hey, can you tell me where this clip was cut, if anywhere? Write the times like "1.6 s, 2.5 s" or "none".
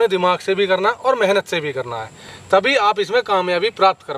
none

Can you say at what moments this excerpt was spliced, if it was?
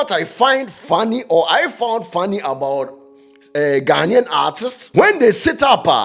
4.7 s

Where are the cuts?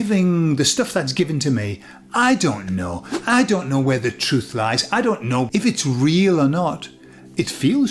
5.5 s

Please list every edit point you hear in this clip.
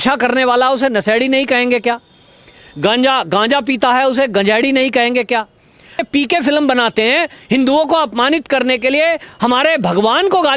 6.0 s

